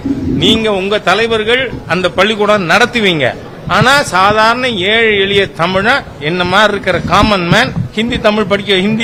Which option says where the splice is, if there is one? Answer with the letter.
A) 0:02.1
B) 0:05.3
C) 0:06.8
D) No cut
D